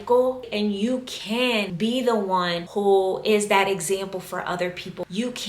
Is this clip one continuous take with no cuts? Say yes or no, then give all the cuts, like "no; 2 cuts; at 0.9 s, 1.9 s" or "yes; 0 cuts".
no; 2 cuts; at 1.7 s, 2.6 s